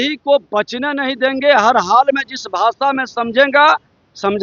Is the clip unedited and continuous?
yes; 0 cuts

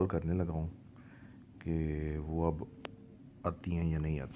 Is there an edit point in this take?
no; 0 cuts

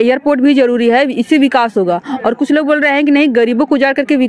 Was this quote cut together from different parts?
no; 0 cuts

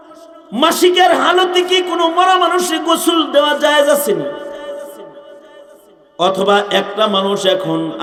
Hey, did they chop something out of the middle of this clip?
no; 0 cuts

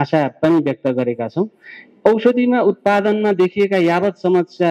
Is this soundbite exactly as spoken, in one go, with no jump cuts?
yes; 0 cuts

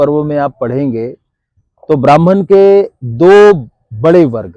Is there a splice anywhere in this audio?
no; 0 cuts

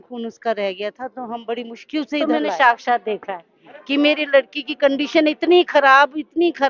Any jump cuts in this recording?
yes; 1 cut; at 2.2 s

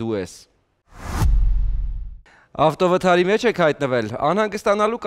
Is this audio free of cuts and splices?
no; 1 cut; at 0.9 s

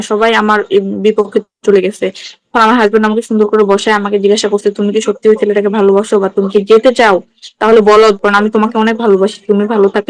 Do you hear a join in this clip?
no; 0 cuts

